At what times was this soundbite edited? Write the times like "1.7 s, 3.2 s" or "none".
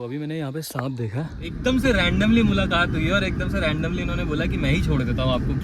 1.4 s